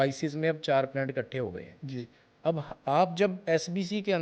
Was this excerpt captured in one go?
yes; 0 cuts

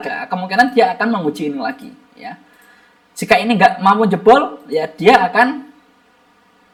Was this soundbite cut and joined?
no; 0 cuts

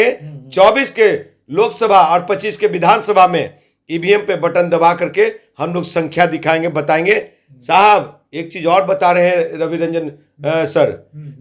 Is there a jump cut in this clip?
no; 0 cuts

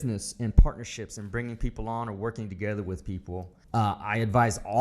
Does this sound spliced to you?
yes; 1 cut; at 3.6 s

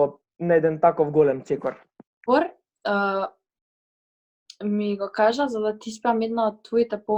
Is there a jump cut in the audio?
yes; 1 cut; at 2.2 s

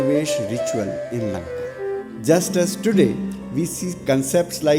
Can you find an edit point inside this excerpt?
yes; 1 cut; at 2.1 s

